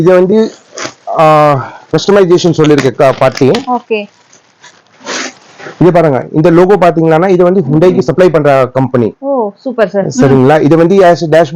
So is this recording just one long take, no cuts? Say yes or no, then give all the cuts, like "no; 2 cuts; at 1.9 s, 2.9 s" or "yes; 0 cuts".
yes; 0 cuts